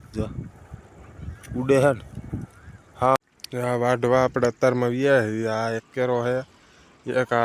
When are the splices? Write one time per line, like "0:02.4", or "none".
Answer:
0:03.2

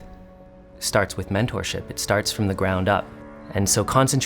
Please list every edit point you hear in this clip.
0:03.1

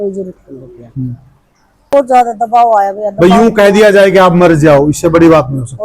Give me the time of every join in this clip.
0:01.9

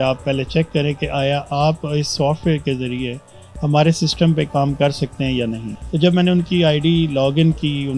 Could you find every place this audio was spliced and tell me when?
0:05.7

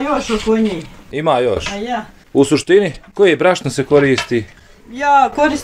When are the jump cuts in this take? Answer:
none

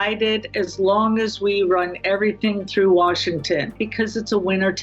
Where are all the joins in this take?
0:03.8

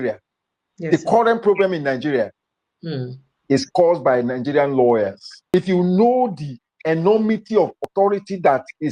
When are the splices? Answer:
0:05.5

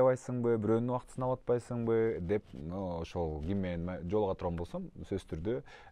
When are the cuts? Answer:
none

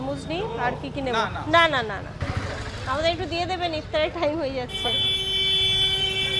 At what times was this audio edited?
none

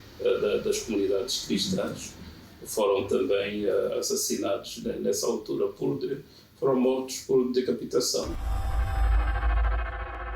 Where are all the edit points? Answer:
0:08.4

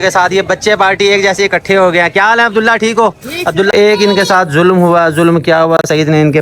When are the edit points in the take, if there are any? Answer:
0:03.7

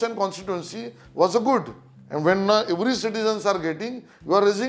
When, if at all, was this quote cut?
none

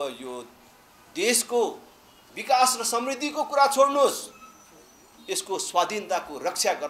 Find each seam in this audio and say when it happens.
none

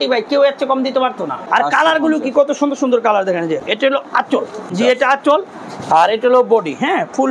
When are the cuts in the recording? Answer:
0:01.3
0:03.6
0:04.7

